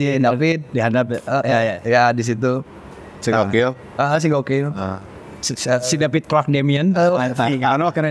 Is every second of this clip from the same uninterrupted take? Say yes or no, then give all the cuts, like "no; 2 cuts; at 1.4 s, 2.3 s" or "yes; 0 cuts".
yes; 0 cuts